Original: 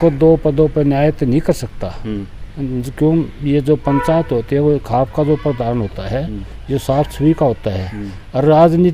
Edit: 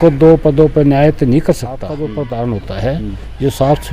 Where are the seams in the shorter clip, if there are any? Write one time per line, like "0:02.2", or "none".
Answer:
0:02.0